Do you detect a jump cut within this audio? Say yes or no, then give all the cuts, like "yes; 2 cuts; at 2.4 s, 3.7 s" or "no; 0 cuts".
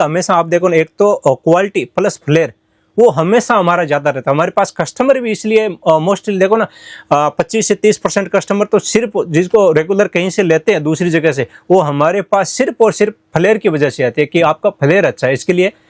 no; 0 cuts